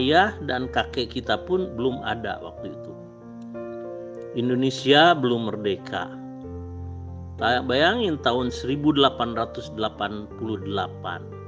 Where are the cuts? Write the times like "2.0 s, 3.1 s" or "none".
none